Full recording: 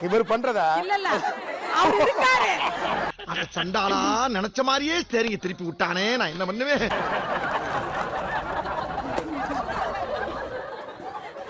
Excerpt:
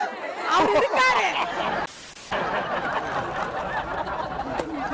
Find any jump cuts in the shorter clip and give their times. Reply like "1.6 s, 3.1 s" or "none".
2.3 s